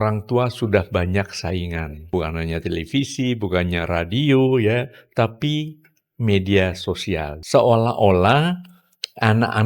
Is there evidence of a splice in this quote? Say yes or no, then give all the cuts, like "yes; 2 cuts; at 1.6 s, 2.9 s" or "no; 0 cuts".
yes; 2 cuts; at 2.1 s, 7.3 s